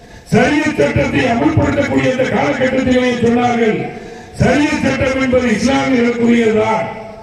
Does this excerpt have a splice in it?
no; 0 cuts

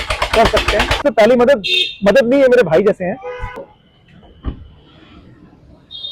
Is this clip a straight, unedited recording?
no; 1 cut; at 1.0 s

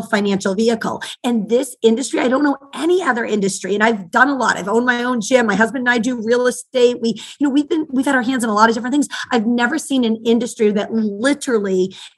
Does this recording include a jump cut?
no; 0 cuts

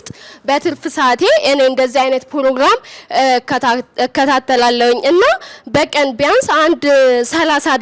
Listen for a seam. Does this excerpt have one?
no; 0 cuts

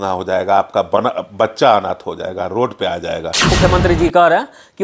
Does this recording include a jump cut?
yes; 1 cut; at 3.5 s

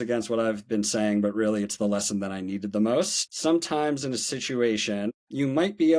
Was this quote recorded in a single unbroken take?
no; 2 cuts; at 3.2 s, 5.1 s

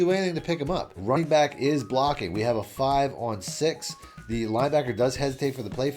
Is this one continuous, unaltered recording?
no; 1 cut; at 1.0 s

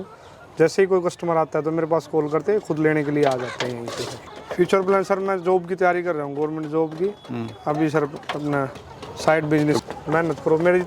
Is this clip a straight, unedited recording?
no; 2 cuts; at 4.2 s, 9.8 s

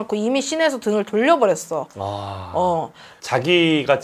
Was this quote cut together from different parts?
no; 0 cuts

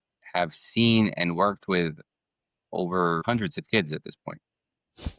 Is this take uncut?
no; 1 cut; at 3.2 s

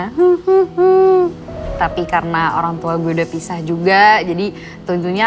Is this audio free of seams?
no; 1 cut; at 1.7 s

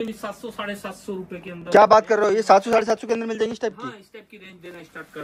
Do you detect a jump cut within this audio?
no; 0 cuts

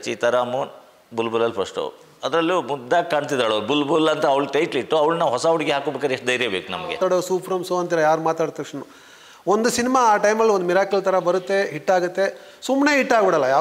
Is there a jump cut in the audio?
yes; 1 cut; at 7.0 s

